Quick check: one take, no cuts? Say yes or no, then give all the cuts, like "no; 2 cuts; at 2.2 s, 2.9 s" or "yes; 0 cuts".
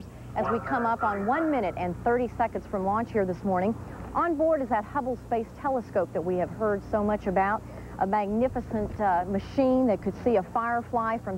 yes; 0 cuts